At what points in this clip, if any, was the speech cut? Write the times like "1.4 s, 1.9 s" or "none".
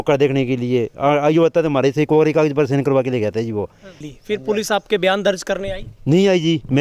4.0 s